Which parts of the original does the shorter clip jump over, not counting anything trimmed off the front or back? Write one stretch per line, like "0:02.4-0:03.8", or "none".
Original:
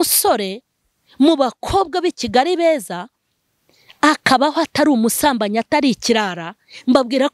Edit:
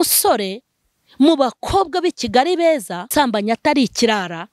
0:03.1-0:05.2